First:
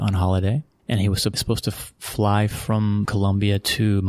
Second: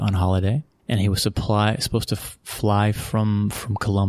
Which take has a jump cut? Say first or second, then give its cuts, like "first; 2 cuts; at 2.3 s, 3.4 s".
first; 2 cuts; at 1.4 s, 3.1 s